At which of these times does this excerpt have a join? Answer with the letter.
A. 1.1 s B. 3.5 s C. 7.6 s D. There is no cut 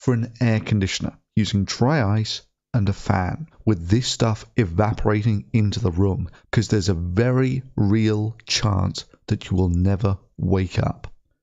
B